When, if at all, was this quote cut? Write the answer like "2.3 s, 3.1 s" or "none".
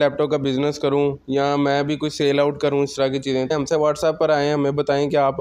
3.5 s